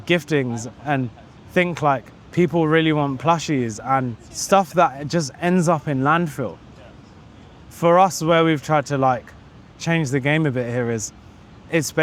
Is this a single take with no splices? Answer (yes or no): yes